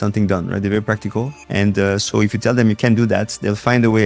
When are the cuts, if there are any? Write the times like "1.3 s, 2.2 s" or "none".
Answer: 1.4 s